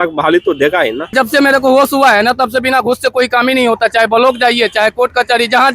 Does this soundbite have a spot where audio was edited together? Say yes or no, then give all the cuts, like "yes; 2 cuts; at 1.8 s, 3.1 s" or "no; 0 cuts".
yes; 1 cut; at 1.1 s